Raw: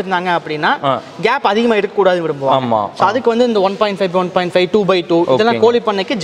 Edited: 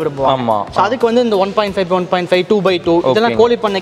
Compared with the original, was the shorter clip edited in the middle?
no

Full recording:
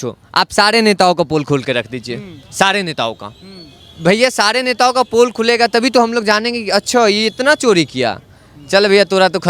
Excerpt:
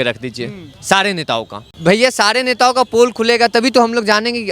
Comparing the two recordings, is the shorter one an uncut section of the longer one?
no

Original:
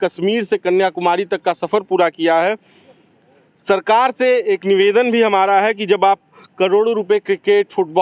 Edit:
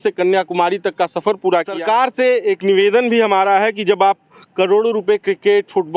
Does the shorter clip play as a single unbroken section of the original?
no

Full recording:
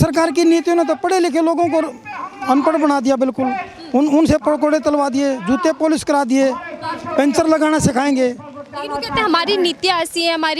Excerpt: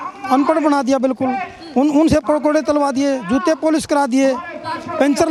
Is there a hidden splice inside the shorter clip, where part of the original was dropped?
no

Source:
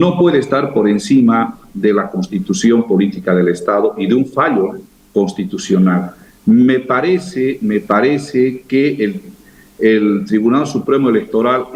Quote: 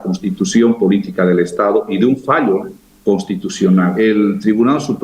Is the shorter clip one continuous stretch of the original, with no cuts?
no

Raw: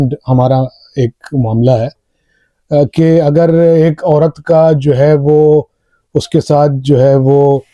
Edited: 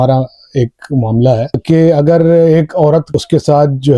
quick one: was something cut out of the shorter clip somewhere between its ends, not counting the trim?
yes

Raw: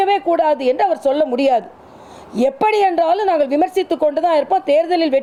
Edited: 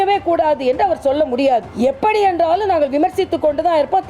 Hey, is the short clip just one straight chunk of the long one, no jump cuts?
no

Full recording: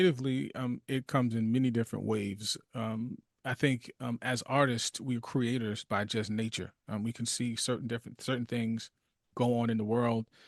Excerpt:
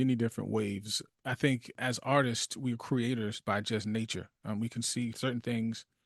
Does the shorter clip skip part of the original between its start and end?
yes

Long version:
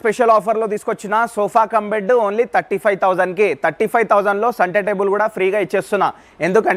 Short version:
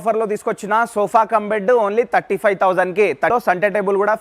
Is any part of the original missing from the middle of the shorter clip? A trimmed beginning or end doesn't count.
yes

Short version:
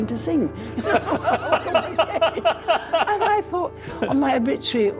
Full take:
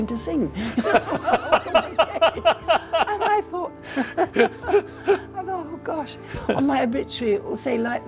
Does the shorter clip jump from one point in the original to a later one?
yes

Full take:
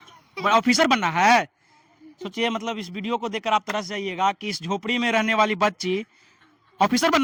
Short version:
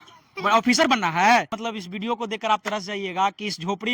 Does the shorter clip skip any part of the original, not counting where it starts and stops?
yes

